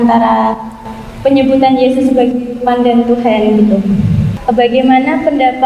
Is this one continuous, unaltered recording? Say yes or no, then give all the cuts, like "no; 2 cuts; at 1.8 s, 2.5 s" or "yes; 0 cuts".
no; 1 cut; at 4.3 s